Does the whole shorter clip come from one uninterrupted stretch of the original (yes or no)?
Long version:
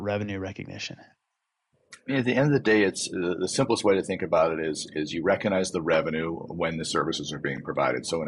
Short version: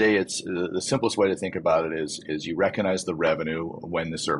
yes